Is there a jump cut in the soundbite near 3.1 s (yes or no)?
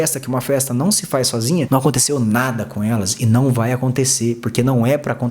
no